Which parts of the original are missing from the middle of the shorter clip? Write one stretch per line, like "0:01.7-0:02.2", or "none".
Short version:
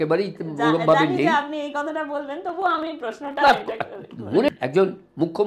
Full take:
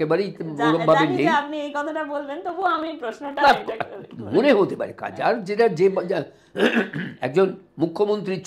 0:04.5-0:07.1